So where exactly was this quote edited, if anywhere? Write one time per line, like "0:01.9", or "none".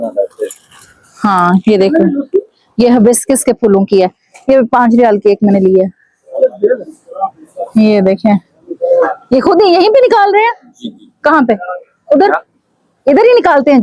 none